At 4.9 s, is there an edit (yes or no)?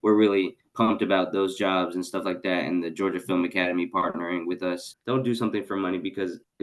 yes